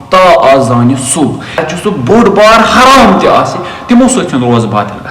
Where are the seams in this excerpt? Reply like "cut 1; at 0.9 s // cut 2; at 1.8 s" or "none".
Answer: cut 1; at 1.6 s